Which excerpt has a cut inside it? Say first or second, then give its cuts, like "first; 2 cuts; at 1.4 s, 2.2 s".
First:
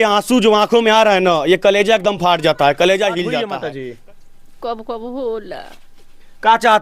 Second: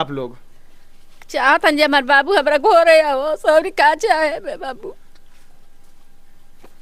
first; 1 cut; at 3.5 s